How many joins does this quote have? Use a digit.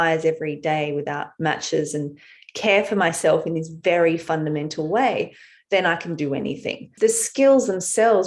1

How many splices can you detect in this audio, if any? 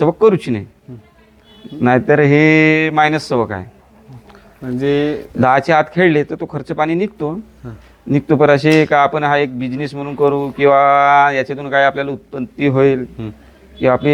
0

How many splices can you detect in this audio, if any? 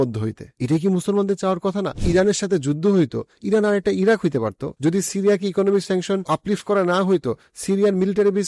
3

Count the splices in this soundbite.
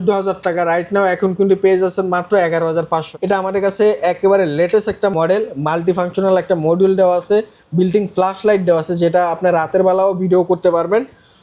1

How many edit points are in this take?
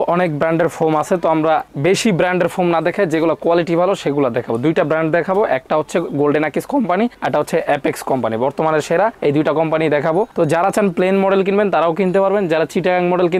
0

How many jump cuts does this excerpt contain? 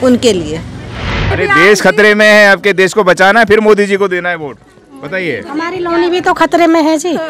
1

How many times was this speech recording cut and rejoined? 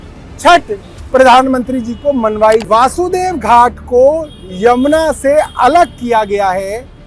1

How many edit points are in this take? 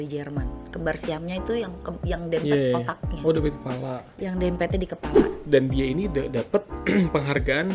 1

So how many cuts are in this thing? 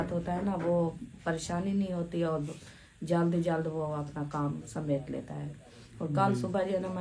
0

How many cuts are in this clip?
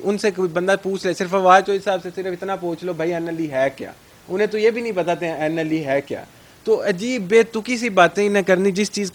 0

